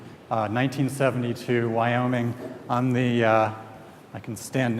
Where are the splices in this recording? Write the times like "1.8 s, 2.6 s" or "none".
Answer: 2.9 s